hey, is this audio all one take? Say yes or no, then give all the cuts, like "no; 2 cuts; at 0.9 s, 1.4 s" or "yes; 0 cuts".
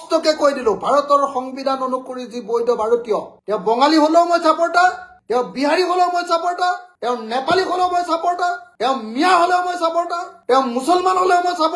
yes; 0 cuts